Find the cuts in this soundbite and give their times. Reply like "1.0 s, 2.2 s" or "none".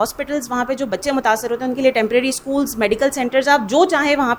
none